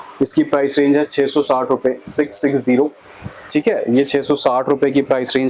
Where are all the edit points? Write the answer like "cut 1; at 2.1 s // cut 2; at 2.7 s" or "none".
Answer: none